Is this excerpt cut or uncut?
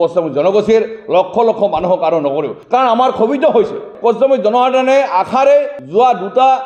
uncut